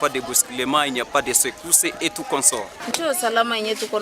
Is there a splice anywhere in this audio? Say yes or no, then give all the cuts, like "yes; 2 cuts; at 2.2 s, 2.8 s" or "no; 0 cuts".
yes; 1 cut; at 2.9 s